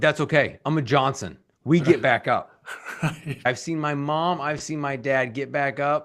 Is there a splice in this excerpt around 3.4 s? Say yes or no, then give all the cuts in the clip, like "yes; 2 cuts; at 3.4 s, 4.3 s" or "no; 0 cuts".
yes; 1 cut; at 3.4 s